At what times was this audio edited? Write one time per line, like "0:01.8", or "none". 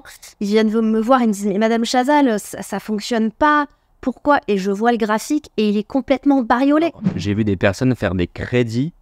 0:07.1